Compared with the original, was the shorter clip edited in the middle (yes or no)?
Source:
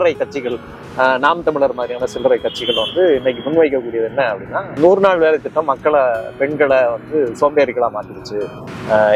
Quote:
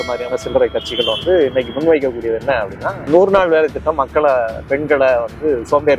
no